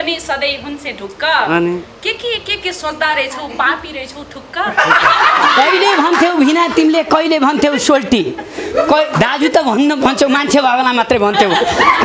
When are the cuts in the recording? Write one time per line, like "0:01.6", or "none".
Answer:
none

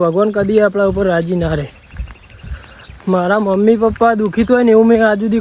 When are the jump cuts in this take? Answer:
0:02.8

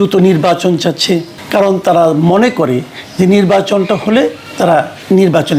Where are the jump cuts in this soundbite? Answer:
0:01.4
0:04.7

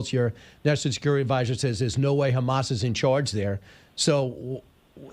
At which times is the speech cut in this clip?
0:02.0

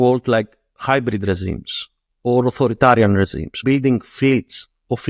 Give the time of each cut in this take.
0:03.6

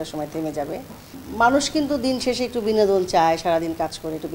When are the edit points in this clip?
0:01.2

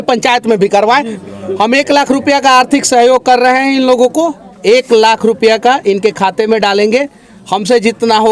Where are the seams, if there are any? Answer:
0:01.1

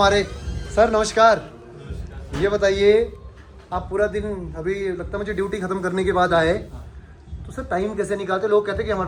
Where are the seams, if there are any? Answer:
none

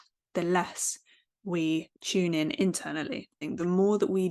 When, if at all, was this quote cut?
0:02.0
0:03.4

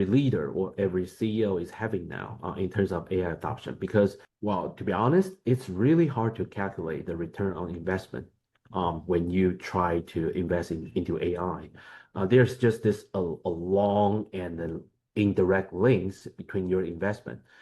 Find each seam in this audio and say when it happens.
0:04.3

